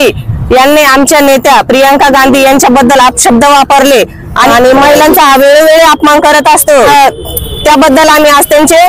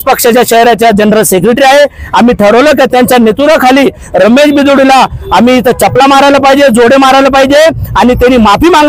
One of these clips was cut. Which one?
first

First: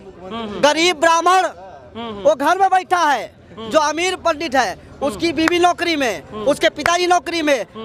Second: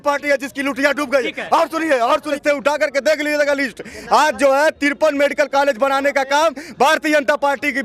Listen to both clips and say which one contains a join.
second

